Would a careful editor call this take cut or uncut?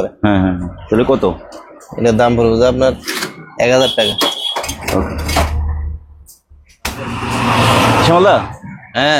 uncut